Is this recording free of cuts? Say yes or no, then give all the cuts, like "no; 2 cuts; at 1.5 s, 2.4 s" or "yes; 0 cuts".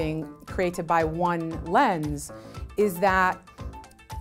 yes; 0 cuts